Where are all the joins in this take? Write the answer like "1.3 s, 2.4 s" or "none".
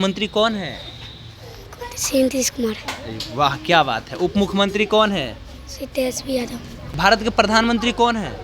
6.9 s